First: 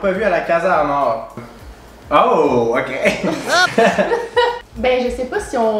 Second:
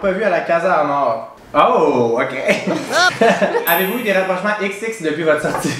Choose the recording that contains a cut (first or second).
second